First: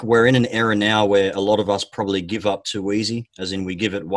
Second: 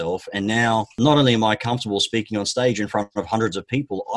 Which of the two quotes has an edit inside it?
second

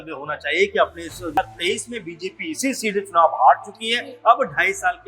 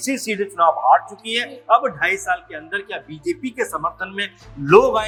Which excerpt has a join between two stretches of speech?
first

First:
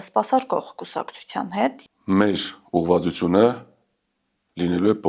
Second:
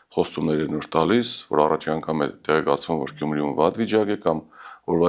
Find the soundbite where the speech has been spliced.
first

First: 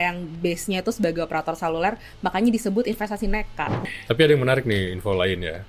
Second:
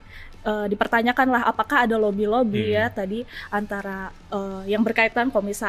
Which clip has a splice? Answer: first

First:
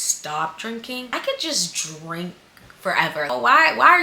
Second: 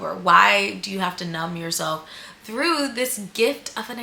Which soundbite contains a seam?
first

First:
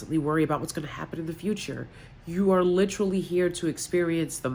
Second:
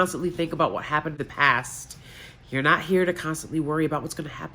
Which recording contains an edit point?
second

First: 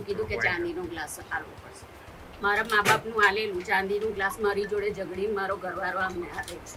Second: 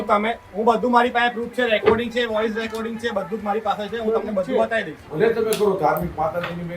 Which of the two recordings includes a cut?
second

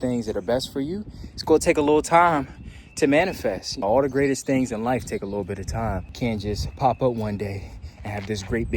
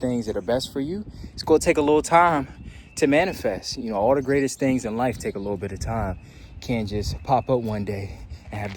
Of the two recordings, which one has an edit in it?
first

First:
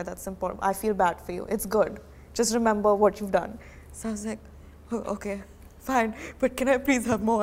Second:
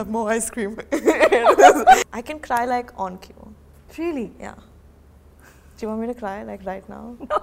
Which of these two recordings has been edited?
second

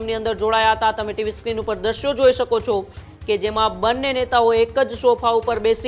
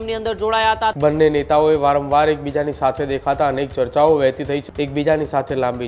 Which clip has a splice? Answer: second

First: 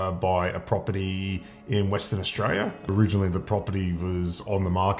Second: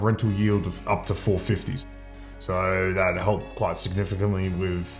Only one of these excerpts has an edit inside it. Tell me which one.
first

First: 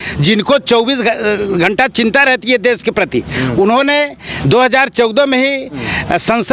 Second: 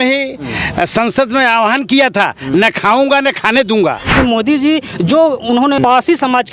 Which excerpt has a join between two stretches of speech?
second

